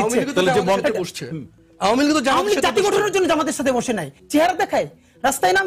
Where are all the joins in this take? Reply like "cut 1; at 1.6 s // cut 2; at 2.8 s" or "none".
cut 1; at 4.2 s